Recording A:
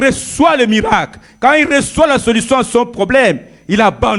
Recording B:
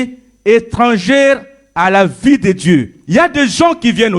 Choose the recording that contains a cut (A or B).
B